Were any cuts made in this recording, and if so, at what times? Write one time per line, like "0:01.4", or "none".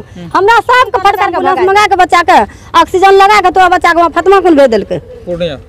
0:01.4